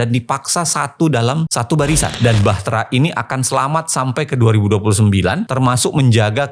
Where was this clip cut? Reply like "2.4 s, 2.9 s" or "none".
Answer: 2.2 s